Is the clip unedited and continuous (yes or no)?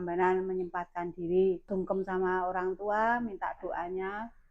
no